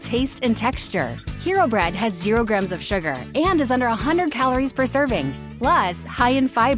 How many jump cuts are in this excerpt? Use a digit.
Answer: 1